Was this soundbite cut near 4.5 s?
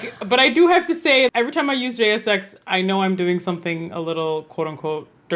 no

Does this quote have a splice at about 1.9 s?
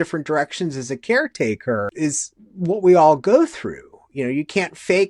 yes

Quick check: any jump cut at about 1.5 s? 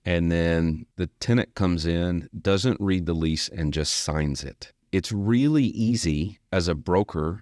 no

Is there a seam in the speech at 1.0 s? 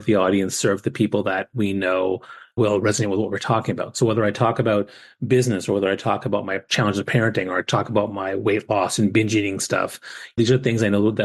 no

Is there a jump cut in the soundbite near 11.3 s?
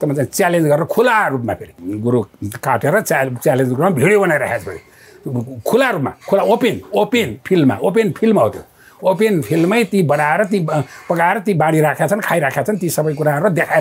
no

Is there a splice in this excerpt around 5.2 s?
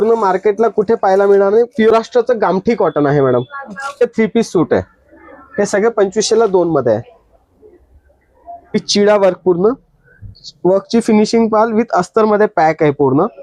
no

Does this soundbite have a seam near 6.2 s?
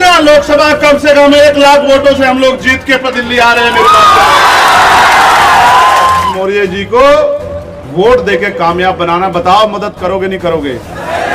yes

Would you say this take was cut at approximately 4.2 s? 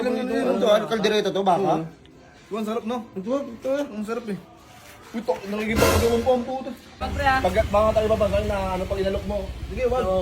no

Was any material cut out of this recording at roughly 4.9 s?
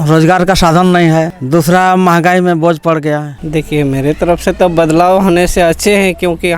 no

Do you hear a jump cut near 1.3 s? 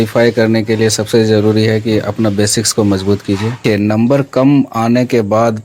no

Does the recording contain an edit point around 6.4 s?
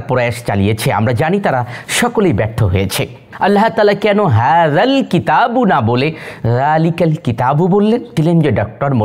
no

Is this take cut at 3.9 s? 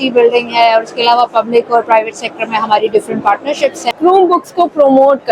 yes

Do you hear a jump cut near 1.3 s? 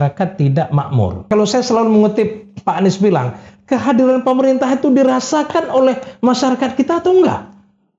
yes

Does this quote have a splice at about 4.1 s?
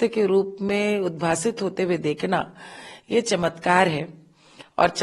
no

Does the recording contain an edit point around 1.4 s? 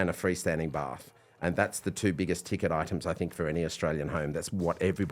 no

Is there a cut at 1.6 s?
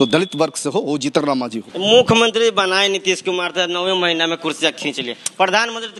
yes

